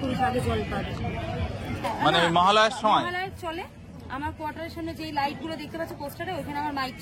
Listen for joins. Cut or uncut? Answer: uncut